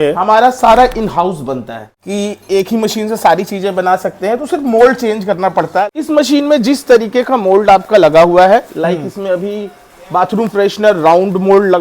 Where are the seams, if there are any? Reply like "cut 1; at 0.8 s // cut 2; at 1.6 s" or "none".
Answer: cut 1; at 1.9 s // cut 2; at 5.8 s